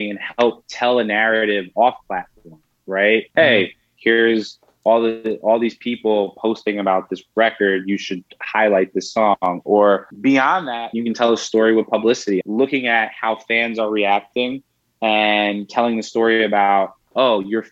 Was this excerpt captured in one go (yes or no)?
no